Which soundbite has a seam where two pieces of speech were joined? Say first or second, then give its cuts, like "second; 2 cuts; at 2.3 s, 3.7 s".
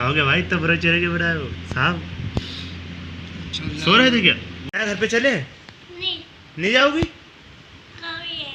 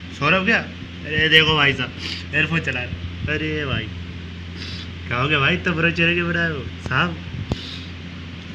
first; 1 cut; at 4.7 s